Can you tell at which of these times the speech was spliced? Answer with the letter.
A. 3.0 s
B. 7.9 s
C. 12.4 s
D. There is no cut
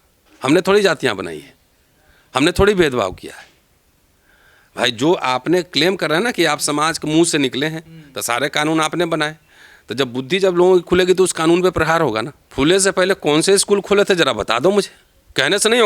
C